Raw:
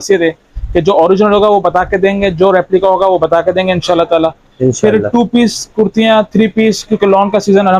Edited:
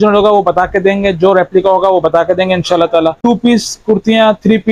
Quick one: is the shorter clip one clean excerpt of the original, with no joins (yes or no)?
no